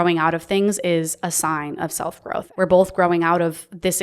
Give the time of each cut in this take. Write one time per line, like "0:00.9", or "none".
0:02.5